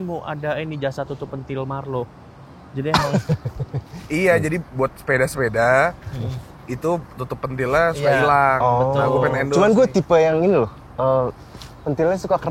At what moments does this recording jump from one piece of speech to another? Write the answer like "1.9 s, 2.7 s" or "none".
none